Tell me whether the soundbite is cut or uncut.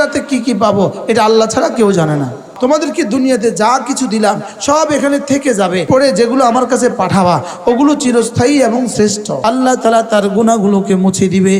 cut